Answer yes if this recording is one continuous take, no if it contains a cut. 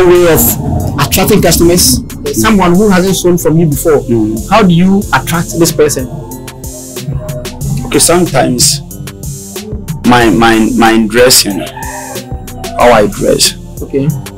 no